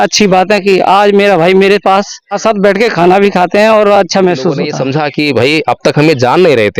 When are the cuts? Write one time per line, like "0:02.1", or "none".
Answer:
0:02.3
0:04.7